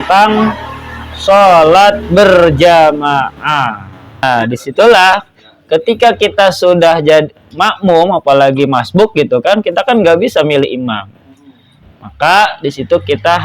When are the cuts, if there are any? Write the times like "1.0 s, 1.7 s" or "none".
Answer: 4.2 s